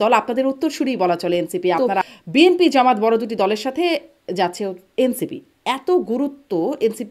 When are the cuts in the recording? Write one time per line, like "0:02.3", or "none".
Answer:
0:01.9